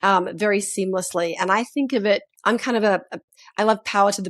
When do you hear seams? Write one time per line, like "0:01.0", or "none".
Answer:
0:02.3